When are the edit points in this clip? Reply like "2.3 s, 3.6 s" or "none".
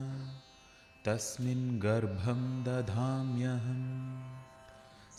none